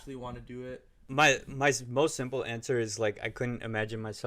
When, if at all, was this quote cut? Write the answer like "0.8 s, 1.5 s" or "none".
1.0 s